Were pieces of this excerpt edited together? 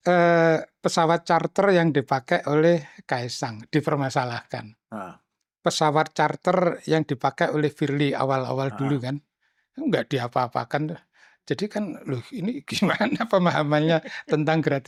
no; 0 cuts

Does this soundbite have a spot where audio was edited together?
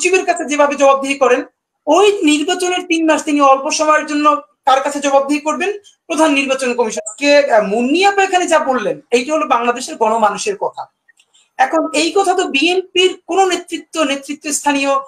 yes; 1 cut; at 7.0 s

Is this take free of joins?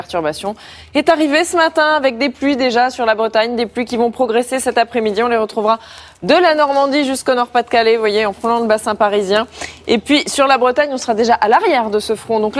yes; 0 cuts

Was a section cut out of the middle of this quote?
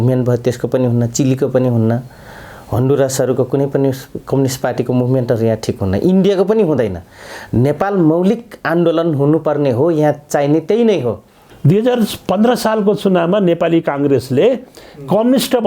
yes; 1 cut; at 11.4 s

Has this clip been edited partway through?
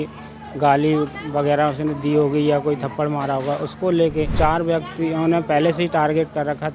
yes; 1 cut; at 4.3 s

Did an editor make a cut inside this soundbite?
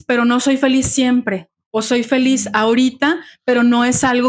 no; 0 cuts

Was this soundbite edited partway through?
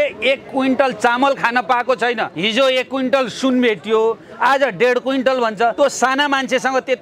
yes; 2 cuts; at 2.3 s, 5.7 s

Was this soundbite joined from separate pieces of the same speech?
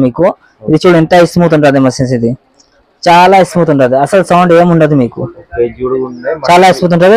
no; 0 cuts

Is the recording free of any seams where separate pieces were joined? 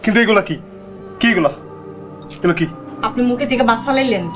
no; 1 cut; at 2.8 s

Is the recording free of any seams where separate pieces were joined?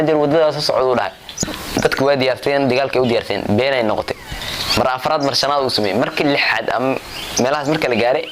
no; 1 cut; at 1.6 s

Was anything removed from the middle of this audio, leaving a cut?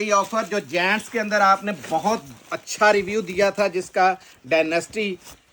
no; 0 cuts

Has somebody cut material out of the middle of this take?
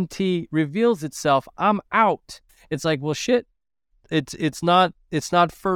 yes; 1 cut; at 2.4 s

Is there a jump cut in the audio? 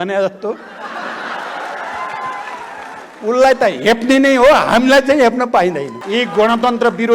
yes; 1 cut; at 5.9 s

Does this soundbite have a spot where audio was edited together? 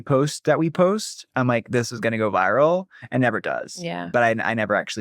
yes; 1 cut; at 4.1 s

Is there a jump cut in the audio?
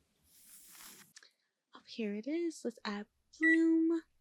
yes; 1 cut; at 1.1 s

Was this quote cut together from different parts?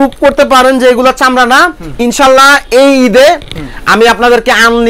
no; 0 cuts

